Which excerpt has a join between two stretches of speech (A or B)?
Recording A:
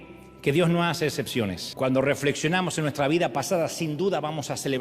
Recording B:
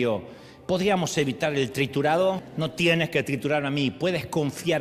A